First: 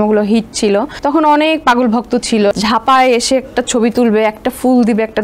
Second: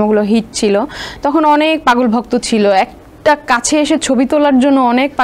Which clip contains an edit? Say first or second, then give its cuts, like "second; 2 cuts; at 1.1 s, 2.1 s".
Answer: first; 2 cuts; at 0.9 s, 2.5 s